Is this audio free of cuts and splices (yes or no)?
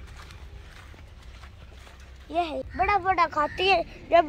no